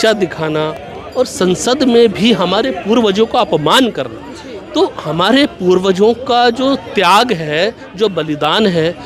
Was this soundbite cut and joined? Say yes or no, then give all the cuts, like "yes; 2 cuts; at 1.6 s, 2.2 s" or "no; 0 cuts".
no; 0 cuts